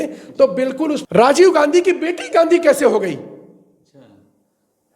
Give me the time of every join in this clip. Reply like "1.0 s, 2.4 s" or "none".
1.0 s